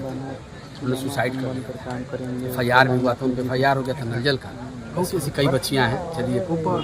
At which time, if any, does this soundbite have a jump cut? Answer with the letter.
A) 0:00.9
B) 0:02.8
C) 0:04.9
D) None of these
C